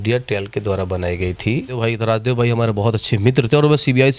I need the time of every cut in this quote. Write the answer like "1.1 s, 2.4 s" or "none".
1.7 s

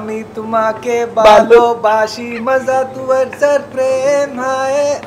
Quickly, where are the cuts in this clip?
none

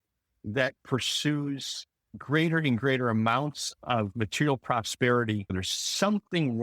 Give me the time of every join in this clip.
5.4 s

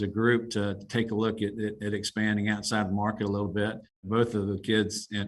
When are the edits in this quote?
4.0 s

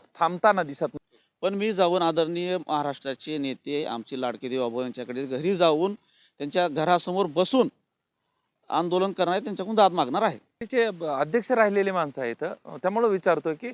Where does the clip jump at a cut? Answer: 0.9 s, 10.5 s

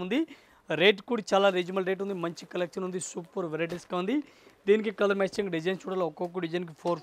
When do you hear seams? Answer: none

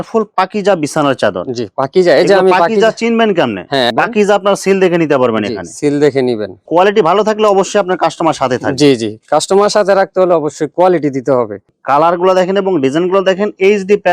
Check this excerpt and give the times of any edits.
6.5 s, 11.7 s

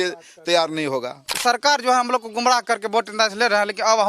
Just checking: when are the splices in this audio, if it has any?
1.4 s

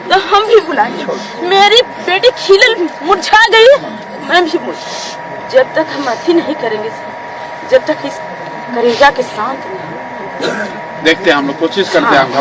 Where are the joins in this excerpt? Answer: 5.4 s

